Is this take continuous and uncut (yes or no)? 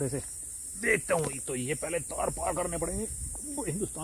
yes